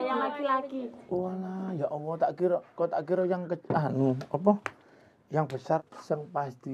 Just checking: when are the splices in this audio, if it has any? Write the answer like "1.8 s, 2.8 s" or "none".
5.8 s

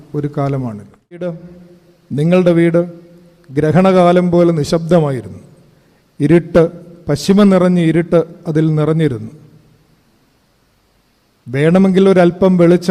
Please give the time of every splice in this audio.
1.4 s

